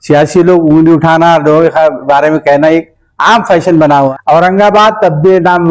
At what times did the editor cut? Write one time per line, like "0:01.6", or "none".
0:04.1